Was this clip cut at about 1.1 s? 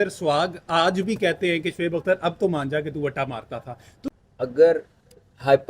no; 1 cut; at 4.1 s

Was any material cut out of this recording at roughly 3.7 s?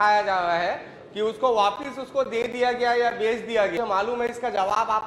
yes; 1 cut; at 3.7 s

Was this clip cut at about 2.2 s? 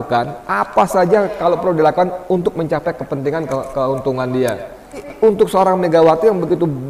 no; 1 cut; at 5.0 s

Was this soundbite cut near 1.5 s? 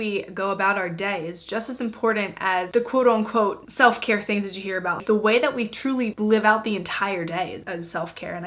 no; 3 cuts; at 2.7 s, 5.0 s, 7.6 s

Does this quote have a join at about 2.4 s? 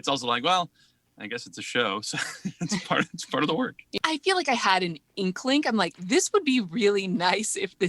no; 2 cuts; at 4.0 s, 5.1 s

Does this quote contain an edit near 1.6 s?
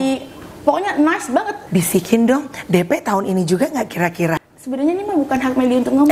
yes; 2 cuts; at 1.6 s, 4.4 s

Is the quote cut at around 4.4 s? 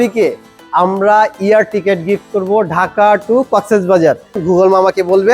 yes; 1 cut; at 4.4 s

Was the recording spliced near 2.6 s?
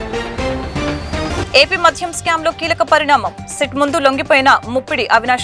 no; 1 cut; at 1.3 s

